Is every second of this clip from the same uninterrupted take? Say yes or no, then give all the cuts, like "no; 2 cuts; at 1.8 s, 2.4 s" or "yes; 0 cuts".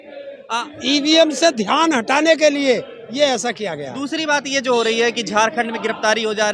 yes; 0 cuts